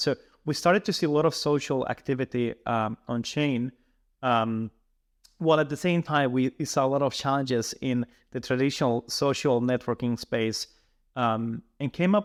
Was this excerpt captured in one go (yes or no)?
yes